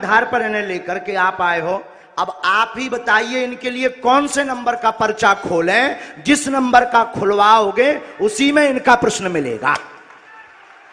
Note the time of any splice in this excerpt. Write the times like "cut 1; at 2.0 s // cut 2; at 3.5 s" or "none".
none

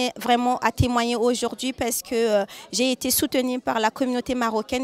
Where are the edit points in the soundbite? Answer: none

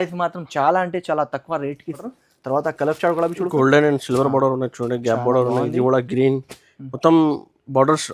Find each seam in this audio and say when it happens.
cut 1; at 2.0 s

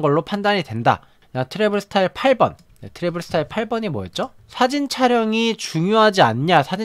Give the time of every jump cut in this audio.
cut 1; at 1.2 s

